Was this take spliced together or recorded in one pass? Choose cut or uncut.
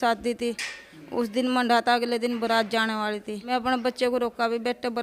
cut